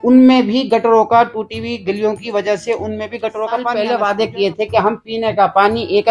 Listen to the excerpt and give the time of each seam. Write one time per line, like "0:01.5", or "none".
0:03.7

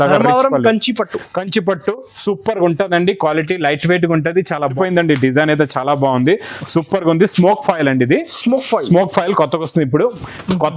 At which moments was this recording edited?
0:04.7

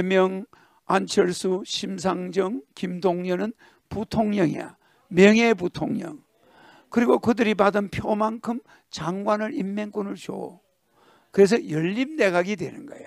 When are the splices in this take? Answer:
none

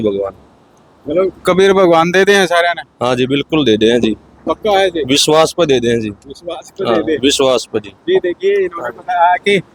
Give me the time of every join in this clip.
none

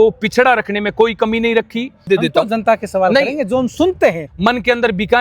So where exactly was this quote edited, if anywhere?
0:02.0
0:04.3

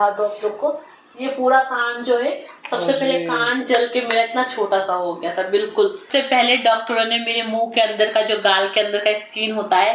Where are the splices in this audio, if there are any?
0:06.1

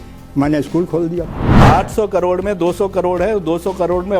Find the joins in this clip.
0:01.4

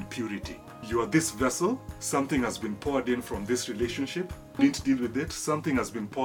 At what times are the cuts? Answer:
0:00.8
0:01.9
0:04.6

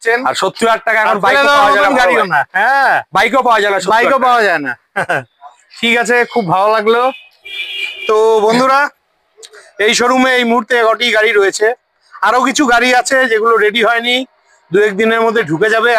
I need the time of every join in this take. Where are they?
none

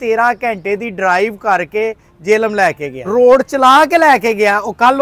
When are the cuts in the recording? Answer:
0:03.0

